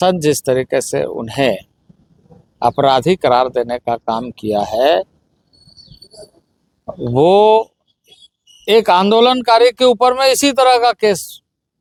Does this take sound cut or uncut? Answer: uncut